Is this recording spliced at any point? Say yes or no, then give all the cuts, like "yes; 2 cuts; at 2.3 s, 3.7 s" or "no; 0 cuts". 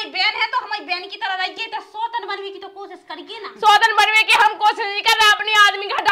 no; 0 cuts